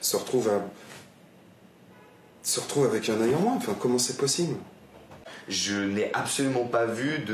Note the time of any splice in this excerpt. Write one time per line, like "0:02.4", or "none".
0:05.3